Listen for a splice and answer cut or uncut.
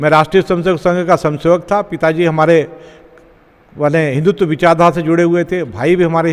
uncut